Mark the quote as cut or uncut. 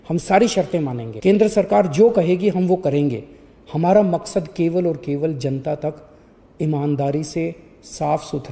cut